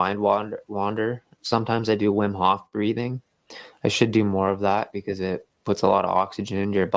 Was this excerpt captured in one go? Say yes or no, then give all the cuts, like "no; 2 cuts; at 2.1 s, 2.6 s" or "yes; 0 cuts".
yes; 0 cuts